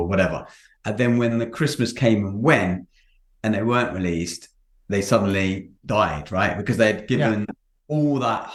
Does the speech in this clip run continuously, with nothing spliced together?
yes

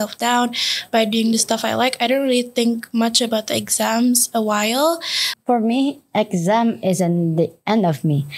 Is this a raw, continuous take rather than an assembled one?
no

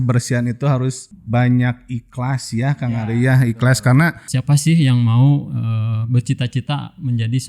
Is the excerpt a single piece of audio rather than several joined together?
no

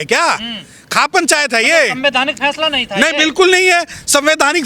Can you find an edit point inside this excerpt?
no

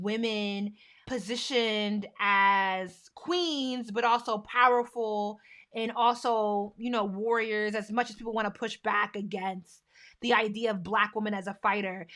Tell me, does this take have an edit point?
yes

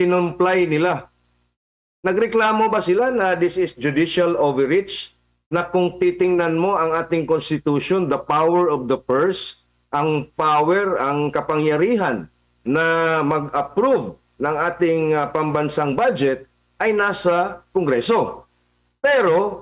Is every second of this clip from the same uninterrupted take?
yes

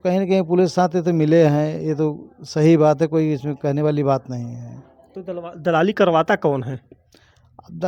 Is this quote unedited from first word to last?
yes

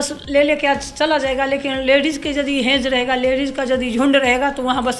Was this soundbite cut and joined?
no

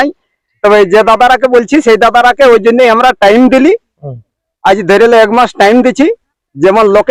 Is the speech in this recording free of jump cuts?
yes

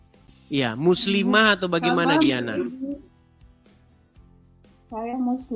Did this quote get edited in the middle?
yes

